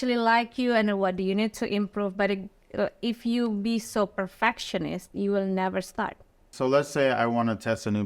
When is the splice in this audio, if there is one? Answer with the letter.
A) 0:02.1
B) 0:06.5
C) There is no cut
B